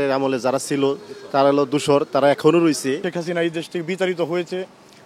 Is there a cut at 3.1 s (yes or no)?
yes